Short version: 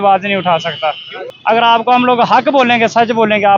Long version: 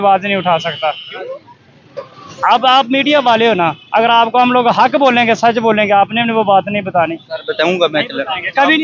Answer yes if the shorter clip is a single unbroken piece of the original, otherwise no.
no